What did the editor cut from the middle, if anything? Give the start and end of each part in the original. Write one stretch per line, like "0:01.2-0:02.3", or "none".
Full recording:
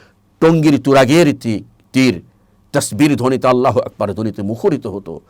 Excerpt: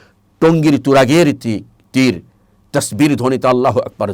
none